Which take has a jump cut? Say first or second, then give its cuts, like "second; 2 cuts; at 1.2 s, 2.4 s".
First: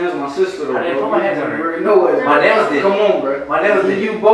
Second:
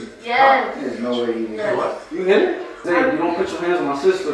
second; 1 cut; at 2.8 s